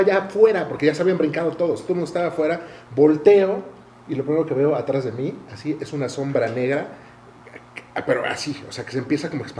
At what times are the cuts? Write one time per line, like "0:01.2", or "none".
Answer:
none